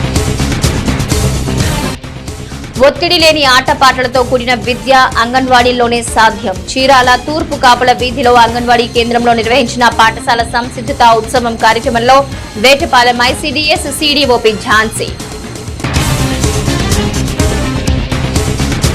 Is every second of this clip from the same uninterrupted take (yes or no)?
yes